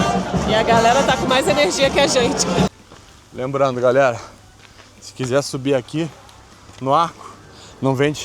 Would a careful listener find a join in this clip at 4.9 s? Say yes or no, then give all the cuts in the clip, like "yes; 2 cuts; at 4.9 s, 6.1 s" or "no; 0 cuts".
no; 1 cut; at 2.6 s